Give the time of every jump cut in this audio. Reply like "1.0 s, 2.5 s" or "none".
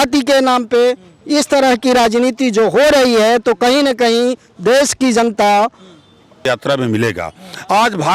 6.4 s